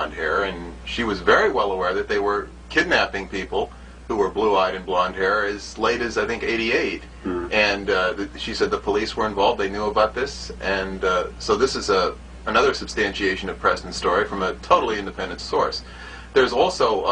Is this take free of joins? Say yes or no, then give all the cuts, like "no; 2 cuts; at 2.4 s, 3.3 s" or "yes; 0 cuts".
no; 1 cut; at 14.9 s